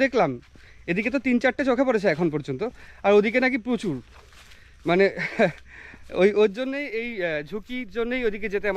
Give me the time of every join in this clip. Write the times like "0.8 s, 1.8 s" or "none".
none